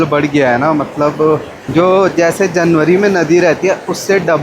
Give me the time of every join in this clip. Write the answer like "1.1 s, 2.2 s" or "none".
1.6 s